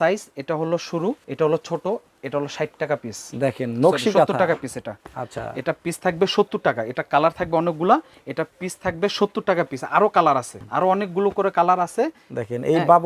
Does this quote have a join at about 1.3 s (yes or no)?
yes